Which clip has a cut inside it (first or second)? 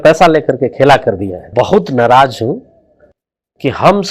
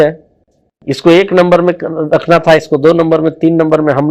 first